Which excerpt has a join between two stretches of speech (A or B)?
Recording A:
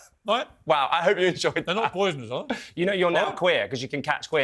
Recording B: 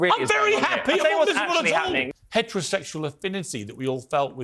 B